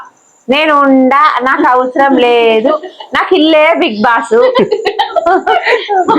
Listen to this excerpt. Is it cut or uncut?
uncut